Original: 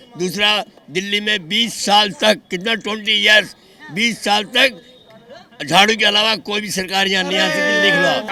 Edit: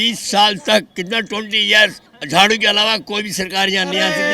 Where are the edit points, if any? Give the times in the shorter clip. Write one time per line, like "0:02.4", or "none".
0:02.1